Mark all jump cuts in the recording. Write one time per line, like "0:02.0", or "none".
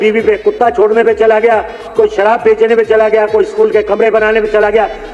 none